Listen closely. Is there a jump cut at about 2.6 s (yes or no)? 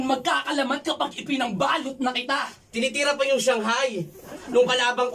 yes